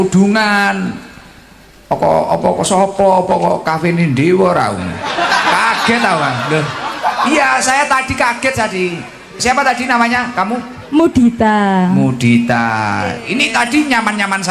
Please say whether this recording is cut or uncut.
uncut